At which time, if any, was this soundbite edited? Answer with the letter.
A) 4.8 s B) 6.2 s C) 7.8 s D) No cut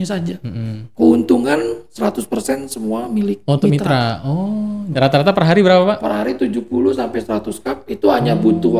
A